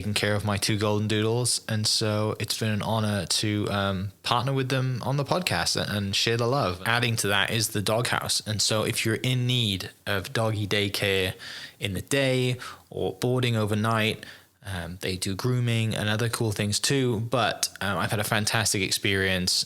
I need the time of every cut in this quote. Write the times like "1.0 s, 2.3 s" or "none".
6.8 s